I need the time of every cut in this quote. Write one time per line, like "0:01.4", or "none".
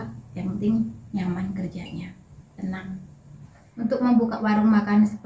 0:03.6

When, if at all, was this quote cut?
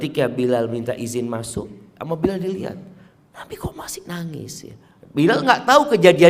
0:01.9

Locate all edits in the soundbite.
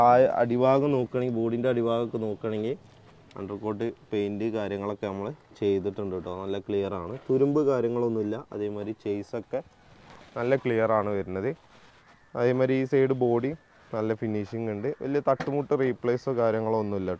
none

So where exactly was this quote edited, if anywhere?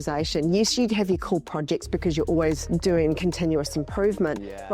0:02.6

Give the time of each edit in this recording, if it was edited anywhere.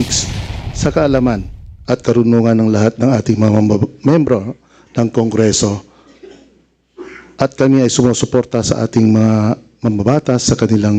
none

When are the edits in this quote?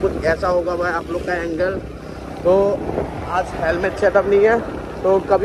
none

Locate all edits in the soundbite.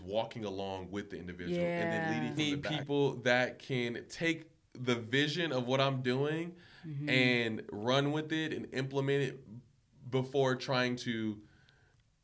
0:02.4

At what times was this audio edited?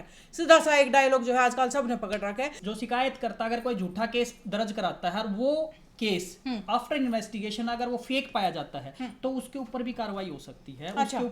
0:02.6

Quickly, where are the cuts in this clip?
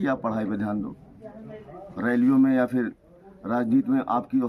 none

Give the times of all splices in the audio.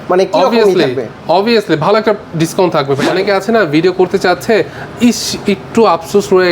0:03.0

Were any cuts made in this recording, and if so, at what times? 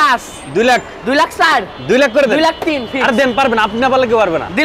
none

